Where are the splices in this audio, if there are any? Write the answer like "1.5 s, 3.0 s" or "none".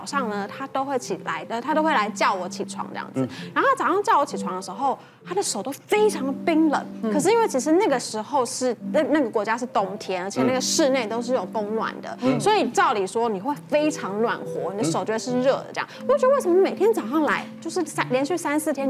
none